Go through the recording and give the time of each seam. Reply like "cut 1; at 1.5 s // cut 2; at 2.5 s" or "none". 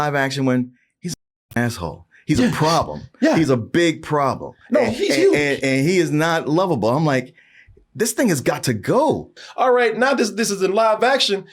cut 1; at 9.3 s